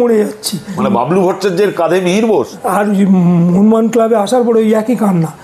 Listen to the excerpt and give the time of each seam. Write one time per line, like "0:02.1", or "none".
0:00.8
0:02.5